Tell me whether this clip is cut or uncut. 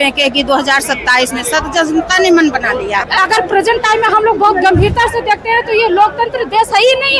cut